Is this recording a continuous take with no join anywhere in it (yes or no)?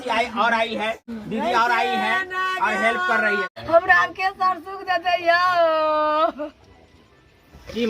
no